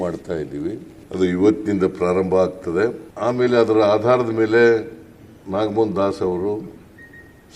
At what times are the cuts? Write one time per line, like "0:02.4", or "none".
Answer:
0:00.9
0:03.1